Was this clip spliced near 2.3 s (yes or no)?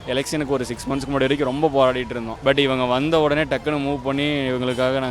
yes